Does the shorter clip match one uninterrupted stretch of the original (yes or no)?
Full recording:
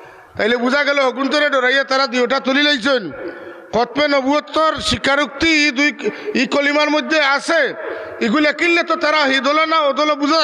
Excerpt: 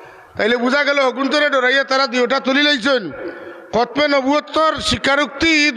yes